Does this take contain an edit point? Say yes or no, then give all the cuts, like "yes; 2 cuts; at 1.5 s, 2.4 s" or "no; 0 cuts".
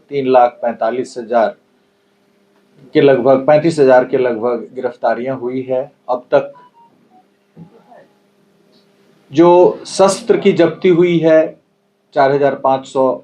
no; 0 cuts